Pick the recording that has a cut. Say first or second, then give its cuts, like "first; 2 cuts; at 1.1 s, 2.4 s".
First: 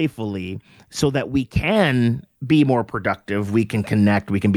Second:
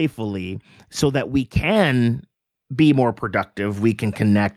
first; 1 cut; at 2.3 s